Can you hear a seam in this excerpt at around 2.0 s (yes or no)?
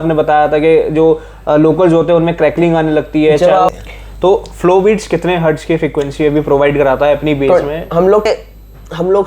no